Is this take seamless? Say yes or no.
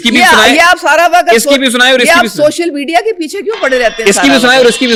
yes